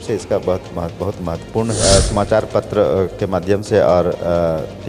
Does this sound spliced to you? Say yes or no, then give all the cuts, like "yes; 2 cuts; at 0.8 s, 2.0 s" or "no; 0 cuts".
yes; 1 cut; at 1.8 s